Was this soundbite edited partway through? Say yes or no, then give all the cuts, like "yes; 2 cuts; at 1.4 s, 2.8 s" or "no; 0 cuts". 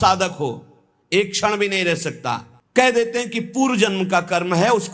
yes; 1 cut; at 2.6 s